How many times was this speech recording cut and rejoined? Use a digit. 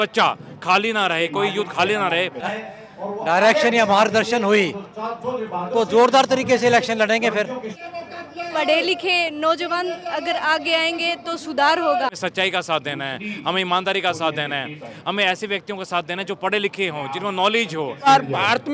4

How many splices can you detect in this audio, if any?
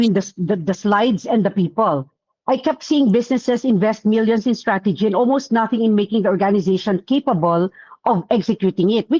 0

